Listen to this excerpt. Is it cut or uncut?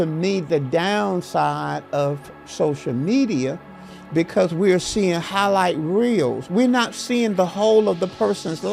uncut